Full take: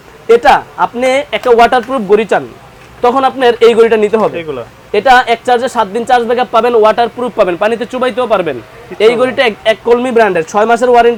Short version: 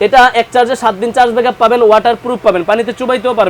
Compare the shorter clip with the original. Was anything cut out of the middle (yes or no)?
no